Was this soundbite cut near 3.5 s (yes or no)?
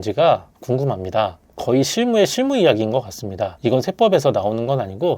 yes